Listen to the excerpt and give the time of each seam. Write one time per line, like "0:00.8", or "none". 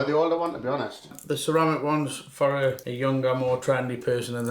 0:01.1
0:02.9